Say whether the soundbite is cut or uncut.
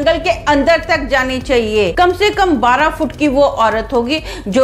cut